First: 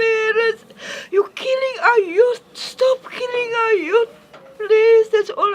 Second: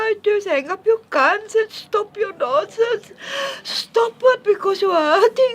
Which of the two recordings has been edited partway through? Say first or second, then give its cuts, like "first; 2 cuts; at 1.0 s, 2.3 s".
second; 1 cut; at 4.4 s